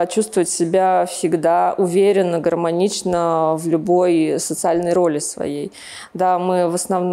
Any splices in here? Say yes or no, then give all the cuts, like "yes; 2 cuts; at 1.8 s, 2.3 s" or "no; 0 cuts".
no; 0 cuts